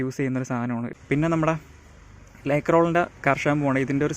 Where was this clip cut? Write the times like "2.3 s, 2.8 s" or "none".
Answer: 0.9 s